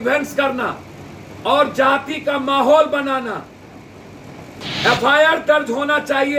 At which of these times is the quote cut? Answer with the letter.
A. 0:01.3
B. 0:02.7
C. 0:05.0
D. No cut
D